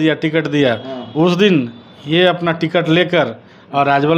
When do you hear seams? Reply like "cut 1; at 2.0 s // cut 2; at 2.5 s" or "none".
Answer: none